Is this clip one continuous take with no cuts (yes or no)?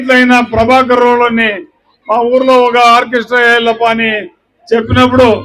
yes